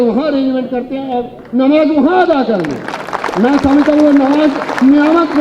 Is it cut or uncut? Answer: uncut